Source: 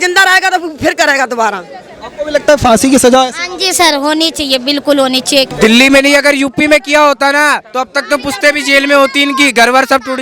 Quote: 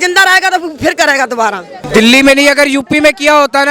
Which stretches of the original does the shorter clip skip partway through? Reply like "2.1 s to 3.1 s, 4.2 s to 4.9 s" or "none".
1.8 s to 5.5 s